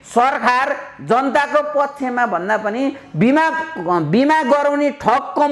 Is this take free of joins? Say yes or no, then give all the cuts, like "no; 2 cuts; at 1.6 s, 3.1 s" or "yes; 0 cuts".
yes; 0 cuts